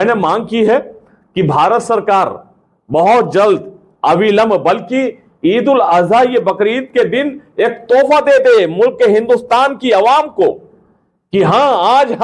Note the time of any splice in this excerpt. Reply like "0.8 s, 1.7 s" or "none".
none